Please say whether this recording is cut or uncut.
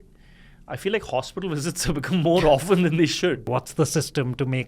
cut